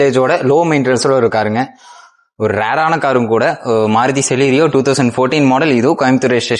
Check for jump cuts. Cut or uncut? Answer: uncut